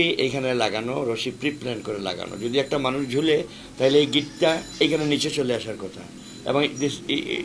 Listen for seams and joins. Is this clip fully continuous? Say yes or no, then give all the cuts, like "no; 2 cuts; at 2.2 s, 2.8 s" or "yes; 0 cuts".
yes; 0 cuts